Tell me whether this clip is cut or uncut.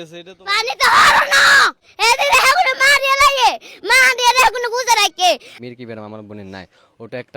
cut